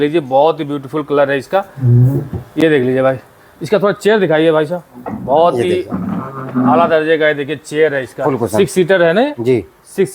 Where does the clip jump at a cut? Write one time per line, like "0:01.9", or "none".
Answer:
none